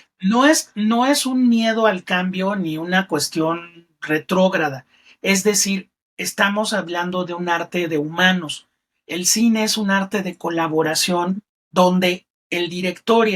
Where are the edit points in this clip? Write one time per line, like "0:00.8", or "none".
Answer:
none